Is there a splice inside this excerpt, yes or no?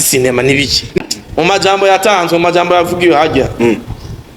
yes